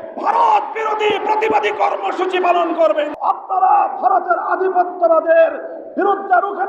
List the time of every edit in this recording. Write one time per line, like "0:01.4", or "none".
0:03.1